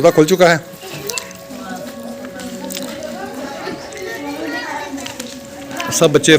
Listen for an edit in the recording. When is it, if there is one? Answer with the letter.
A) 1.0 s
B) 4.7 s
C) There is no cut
B